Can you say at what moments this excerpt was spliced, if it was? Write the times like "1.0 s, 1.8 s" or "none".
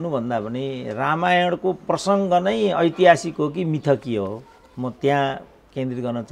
none